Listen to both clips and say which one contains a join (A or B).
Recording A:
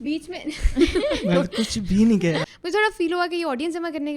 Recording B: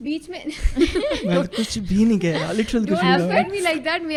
A